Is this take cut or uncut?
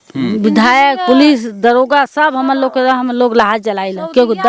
uncut